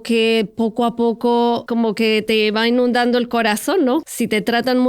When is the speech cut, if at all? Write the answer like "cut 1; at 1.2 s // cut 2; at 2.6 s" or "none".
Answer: cut 1; at 1.6 s // cut 2; at 4.0 s